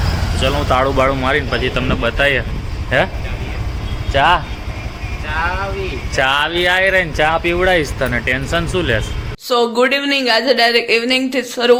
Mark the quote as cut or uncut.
uncut